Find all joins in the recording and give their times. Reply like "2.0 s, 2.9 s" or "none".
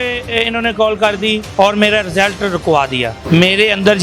1.4 s, 3.1 s